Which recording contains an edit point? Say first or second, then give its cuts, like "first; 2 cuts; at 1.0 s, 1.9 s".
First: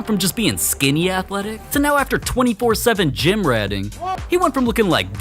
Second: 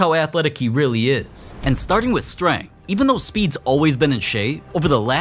first; 1 cut; at 4.2 s